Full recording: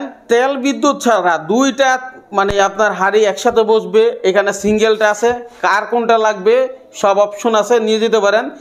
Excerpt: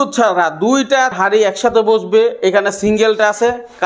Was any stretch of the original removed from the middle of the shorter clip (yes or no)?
yes